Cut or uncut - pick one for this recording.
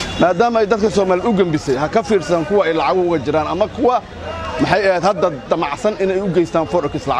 uncut